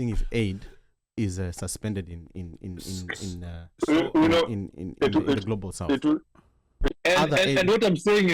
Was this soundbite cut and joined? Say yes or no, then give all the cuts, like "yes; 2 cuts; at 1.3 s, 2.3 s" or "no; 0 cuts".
yes; 1 cut; at 6.9 s